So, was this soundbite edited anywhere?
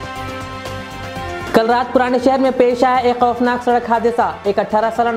yes; 1 cut; at 1.3 s

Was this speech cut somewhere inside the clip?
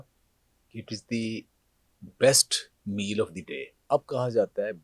yes; 1 cut; at 3.7 s

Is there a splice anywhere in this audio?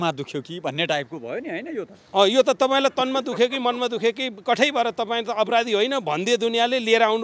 no; 0 cuts

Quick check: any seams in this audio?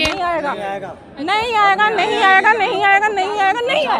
no; 0 cuts

